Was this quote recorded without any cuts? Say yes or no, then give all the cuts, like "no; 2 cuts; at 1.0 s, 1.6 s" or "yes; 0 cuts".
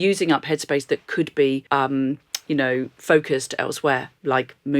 no; 2 cuts; at 1.6 s, 2.9 s